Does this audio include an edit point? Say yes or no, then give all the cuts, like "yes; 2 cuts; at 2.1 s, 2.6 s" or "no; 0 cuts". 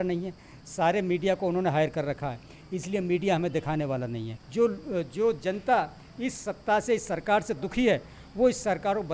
yes; 1 cut; at 4.3 s